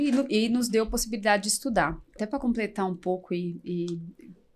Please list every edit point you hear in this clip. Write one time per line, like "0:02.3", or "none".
0:02.1